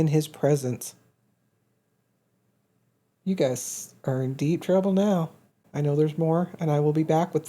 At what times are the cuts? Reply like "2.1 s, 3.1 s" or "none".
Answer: 5.6 s

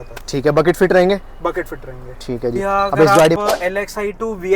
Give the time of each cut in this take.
3.4 s

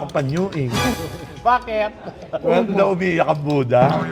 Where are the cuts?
0.9 s

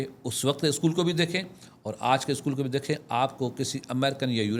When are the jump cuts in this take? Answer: none

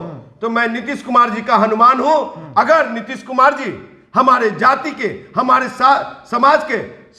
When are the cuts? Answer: none

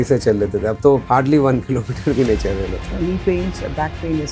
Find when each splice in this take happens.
1.0 s, 2.8 s

